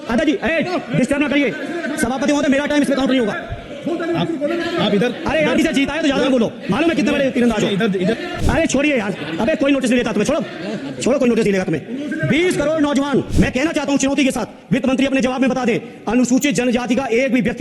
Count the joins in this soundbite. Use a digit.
2